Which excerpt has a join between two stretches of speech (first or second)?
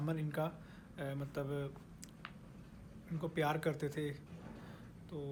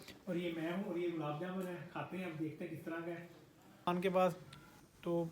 second